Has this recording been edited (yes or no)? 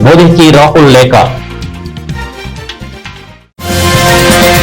yes